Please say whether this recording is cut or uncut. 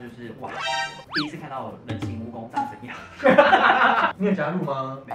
cut